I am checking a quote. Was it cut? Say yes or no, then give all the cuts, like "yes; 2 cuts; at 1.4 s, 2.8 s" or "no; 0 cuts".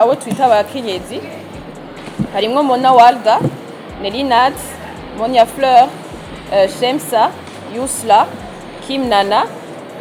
no; 0 cuts